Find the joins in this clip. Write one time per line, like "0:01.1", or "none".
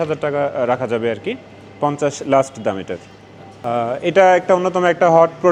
none